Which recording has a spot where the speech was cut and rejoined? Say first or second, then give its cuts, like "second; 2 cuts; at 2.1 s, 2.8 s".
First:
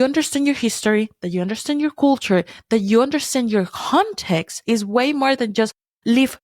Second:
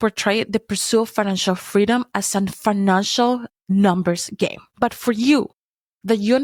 first; 1 cut; at 4.6 s